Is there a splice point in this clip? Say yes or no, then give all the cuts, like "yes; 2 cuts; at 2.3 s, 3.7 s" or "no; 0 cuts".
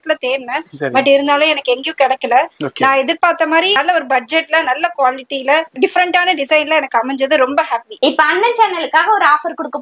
yes; 3 cuts; at 3.8 s, 5.7 s, 7.9 s